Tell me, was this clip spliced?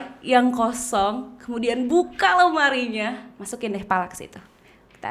no; 0 cuts

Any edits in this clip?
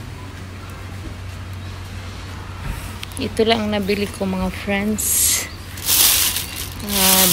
no; 0 cuts

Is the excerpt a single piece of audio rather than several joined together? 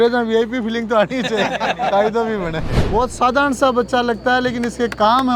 no; 1 cut; at 2.7 s

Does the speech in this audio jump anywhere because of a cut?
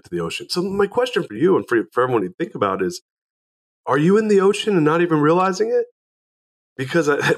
yes; 1 cut; at 1.2 s

